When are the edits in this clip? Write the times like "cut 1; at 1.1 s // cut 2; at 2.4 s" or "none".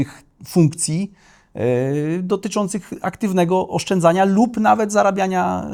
none

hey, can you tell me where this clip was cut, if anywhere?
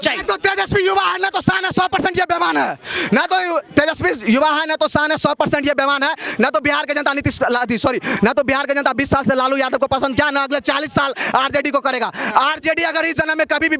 none

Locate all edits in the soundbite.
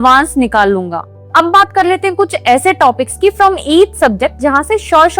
cut 1; at 1.2 s

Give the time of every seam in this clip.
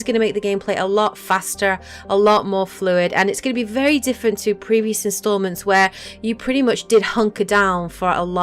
cut 1; at 1.5 s

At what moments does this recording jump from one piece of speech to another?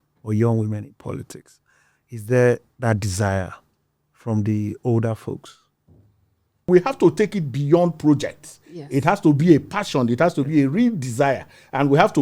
cut 1; at 6.7 s

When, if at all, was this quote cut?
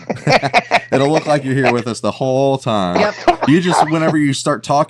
none

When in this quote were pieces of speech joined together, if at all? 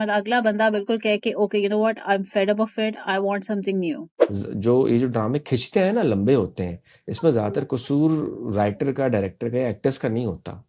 cut 1; at 4.1 s

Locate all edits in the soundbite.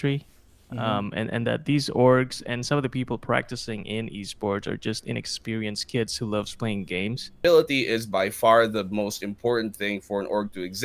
cut 1; at 7.4 s

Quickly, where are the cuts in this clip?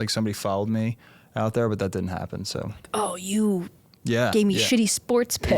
none

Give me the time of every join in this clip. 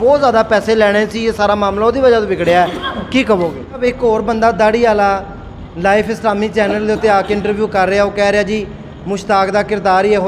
cut 1; at 3.8 s

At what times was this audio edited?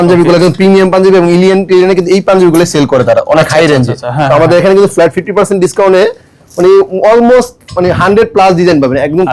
none

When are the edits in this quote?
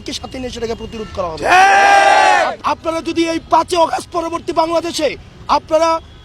cut 1; at 2.6 s

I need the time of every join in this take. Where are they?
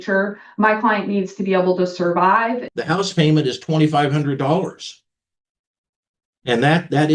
cut 1; at 2.7 s

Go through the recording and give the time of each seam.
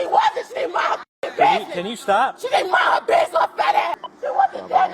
cut 1; at 3.9 s

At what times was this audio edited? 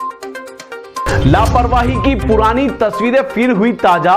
cut 1; at 1.0 s

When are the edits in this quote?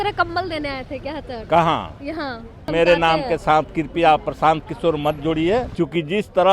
cut 1; at 2.7 s // cut 2; at 5.7 s

